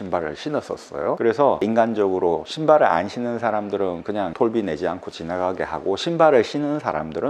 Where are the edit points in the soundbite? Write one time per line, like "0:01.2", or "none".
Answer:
none